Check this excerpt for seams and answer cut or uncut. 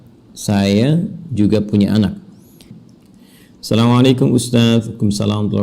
cut